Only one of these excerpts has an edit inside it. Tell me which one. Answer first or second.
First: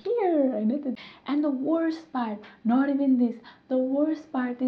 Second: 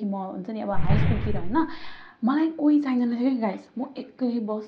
first